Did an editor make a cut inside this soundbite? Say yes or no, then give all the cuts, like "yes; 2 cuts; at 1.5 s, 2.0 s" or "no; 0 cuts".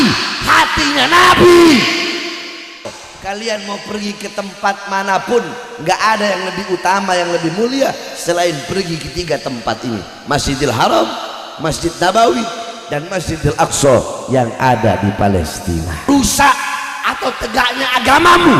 yes; 2 cuts; at 2.8 s, 16.1 s